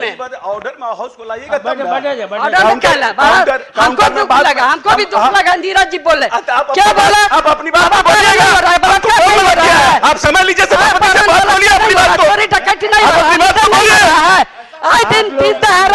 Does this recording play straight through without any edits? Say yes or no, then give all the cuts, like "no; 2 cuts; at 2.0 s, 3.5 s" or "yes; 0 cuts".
yes; 0 cuts